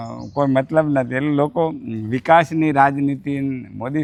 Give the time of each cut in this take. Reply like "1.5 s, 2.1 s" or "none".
none